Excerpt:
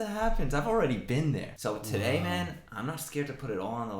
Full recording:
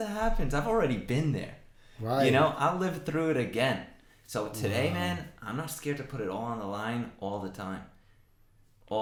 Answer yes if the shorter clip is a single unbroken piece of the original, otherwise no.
no